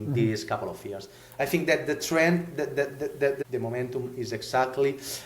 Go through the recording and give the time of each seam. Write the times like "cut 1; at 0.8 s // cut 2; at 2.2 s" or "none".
cut 1; at 3.4 s

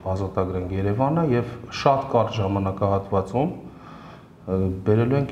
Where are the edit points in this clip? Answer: none

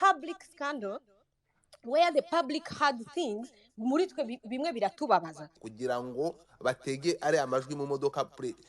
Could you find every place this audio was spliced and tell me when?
cut 1; at 5.5 s

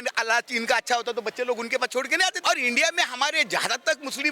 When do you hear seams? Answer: cut 1; at 2.4 s

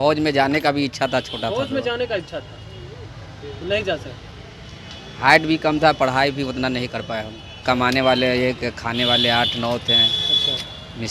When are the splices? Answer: cut 1; at 7.6 s

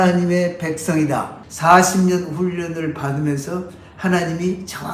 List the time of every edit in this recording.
cut 1; at 1.4 s

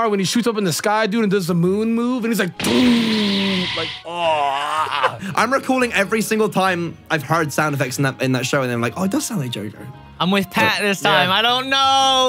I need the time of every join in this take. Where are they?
none

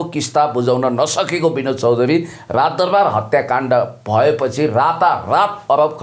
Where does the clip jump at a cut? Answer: none

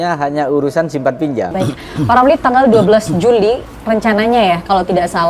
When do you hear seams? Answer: cut 1; at 1.5 s

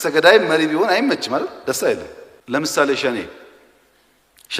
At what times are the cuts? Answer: cut 1; at 2.2 s

